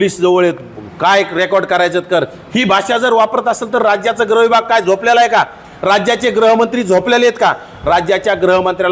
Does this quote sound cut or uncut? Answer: uncut